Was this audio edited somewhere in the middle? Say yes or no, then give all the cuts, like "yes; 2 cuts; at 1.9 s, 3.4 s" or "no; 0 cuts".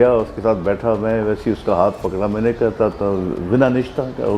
no; 0 cuts